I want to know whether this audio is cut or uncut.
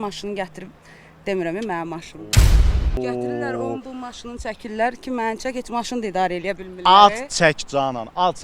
uncut